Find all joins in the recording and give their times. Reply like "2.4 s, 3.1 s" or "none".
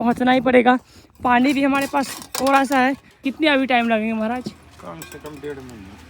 3.2 s